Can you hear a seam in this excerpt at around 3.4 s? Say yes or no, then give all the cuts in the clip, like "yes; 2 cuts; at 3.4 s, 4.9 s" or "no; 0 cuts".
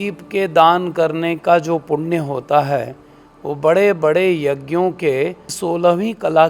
no; 1 cut; at 5.5 s